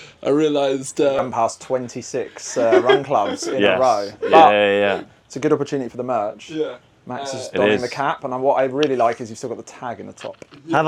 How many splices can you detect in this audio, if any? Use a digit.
0